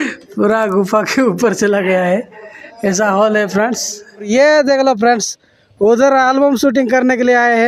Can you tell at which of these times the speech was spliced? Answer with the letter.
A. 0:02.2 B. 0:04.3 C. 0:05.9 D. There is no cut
B